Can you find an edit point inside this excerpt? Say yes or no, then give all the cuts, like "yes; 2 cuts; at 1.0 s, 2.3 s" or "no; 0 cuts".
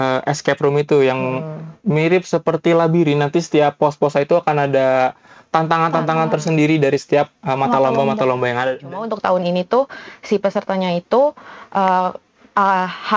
yes; 1 cut; at 9.1 s